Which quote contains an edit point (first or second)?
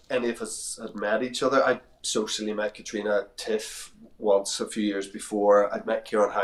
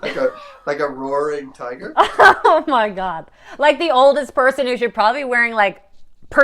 second